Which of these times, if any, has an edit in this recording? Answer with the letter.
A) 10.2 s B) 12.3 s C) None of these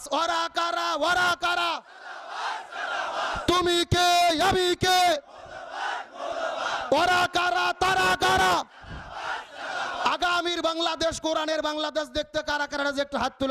C